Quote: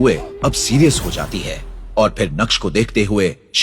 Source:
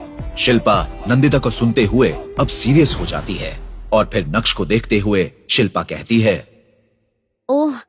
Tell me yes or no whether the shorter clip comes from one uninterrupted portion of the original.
yes